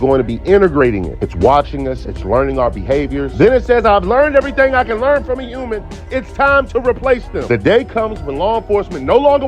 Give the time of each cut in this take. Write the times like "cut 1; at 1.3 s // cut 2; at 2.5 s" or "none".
cut 1; at 3.8 s